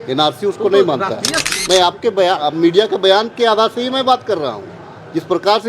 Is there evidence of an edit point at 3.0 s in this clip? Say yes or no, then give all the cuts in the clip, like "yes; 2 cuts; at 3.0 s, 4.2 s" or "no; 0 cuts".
no; 1 cut; at 1.5 s